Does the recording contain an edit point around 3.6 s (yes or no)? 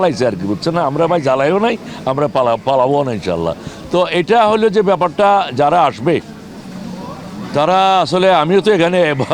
no